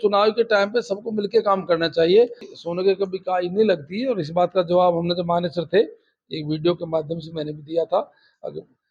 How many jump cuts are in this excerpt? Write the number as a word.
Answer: one